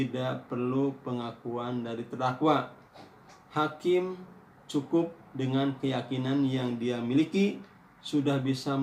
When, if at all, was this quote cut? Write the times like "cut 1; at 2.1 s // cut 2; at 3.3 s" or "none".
none

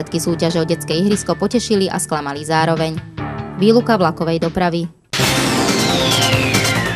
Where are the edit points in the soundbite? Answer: cut 1; at 5.0 s

